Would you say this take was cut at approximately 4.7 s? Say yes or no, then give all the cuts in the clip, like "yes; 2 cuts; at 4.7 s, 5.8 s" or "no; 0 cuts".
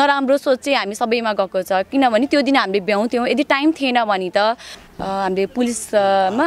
yes; 1 cut; at 4.7 s